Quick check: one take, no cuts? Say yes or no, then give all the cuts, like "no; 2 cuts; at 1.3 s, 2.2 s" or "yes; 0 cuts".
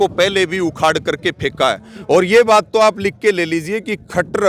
yes; 0 cuts